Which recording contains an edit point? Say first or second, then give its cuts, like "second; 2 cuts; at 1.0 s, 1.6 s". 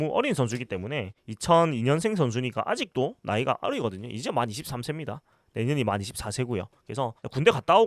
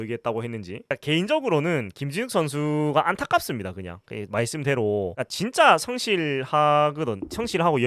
second; 1 cut; at 0.9 s